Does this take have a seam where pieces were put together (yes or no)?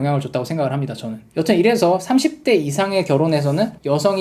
yes